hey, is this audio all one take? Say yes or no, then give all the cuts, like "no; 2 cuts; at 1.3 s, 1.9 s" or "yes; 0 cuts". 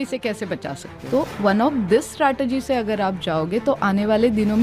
no; 1 cut; at 0.9 s